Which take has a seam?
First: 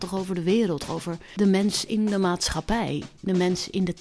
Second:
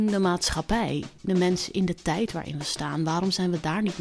first; 1 cut; at 0.9 s

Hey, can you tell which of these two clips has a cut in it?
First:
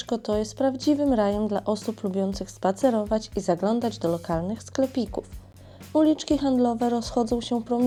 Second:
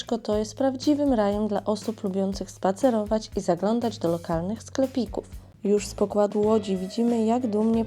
second; 1 cut; at 5.4 s

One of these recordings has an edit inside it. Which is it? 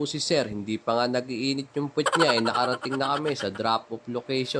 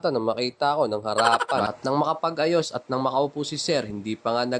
second; 1 cut; at 1.7 s

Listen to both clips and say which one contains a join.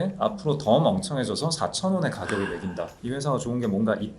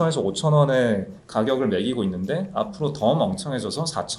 first; 1 cut; at 2.9 s

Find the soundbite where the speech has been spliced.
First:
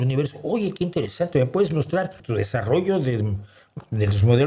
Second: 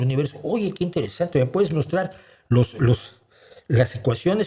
first; 1 cut; at 2.2 s

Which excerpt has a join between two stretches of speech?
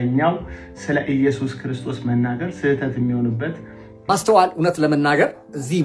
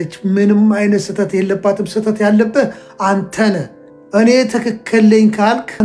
first; 1 cut; at 3.9 s

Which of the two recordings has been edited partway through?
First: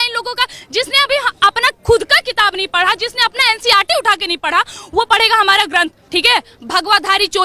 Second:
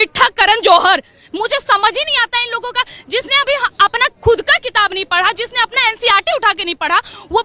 first; 1 cut; at 6.0 s

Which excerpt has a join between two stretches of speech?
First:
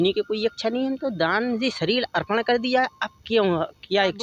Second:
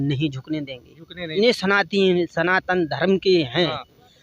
second; 1 cut; at 1.3 s

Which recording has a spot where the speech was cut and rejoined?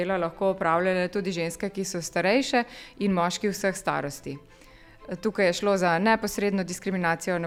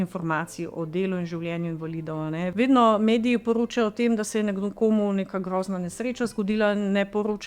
second; 1 cut; at 2.5 s

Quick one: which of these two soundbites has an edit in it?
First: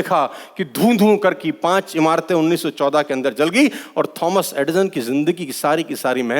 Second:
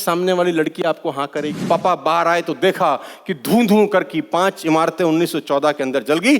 second; 1 cut; at 1.6 s

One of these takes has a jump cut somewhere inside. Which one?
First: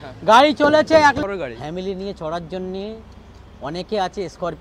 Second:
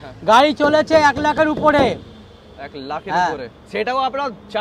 first; 1 cut; at 1.2 s

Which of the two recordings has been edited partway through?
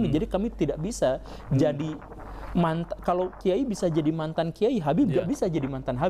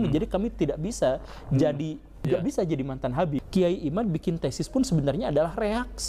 second; 2 cuts; at 2.3 s, 3.4 s

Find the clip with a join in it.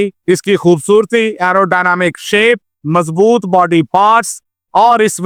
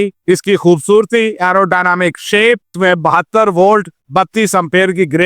second; 1 cut; at 2.7 s

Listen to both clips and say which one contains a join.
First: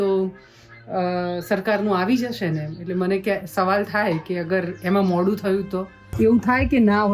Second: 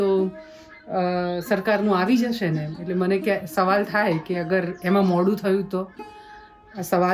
first; 1 cut; at 6.1 s

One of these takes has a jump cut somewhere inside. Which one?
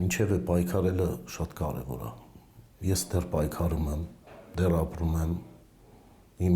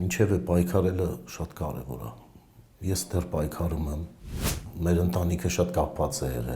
second; 1 cut; at 4.6 s

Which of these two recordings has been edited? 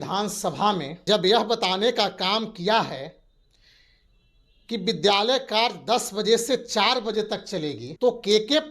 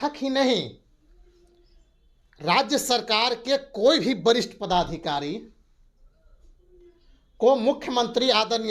first; 2 cuts; at 0.9 s, 7.9 s

